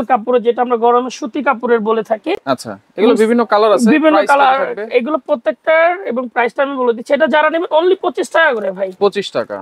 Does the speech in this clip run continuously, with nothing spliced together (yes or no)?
yes